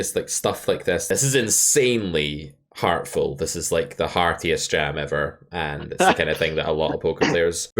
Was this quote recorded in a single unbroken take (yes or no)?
no